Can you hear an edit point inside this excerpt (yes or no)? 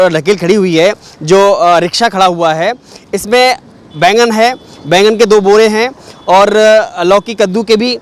no